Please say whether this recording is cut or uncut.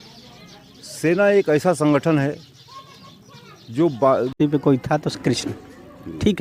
cut